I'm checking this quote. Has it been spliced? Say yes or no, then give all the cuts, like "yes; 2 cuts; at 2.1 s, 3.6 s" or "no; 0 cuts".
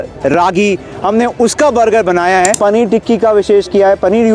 yes; 1 cut; at 2.6 s